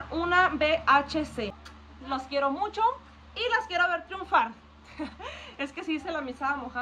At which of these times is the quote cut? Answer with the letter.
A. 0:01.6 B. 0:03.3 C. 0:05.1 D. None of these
A